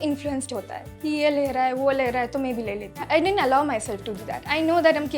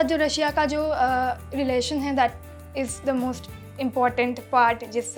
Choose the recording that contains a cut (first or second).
first